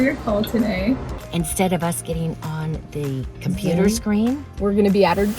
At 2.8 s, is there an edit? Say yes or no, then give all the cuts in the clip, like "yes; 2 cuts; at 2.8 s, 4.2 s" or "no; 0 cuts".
no; 2 cuts; at 1.1 s, 4.5 s